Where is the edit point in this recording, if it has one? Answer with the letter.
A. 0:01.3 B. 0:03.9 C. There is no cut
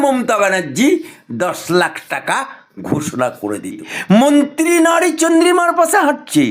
B